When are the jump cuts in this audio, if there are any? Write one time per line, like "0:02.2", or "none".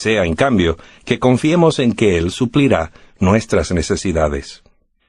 0:03.4